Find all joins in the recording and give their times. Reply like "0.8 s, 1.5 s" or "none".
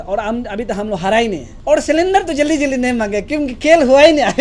1.5 s